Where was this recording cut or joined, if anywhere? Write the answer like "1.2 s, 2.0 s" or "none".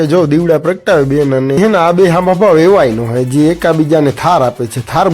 1.6 s